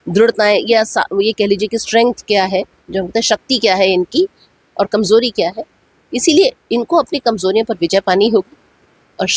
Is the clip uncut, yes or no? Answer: yes